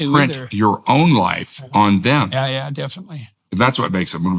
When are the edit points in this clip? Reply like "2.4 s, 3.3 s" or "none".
3.3 s